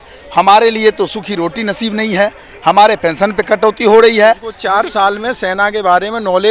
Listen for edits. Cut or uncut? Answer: cut